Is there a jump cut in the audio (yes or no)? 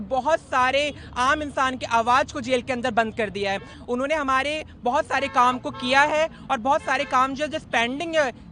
yes